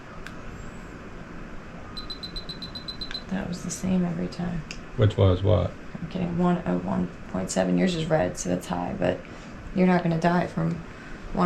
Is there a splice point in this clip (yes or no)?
no